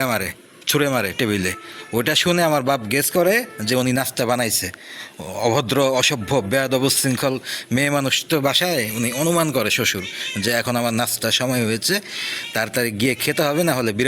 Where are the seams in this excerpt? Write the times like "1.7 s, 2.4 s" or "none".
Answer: none